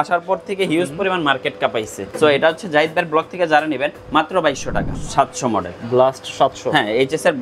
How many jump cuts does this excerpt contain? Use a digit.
2